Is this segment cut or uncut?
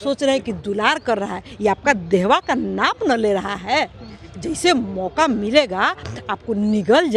uncut